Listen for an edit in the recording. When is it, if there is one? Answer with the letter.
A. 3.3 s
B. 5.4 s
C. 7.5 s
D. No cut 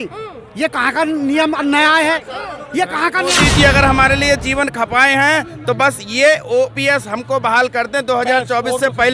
A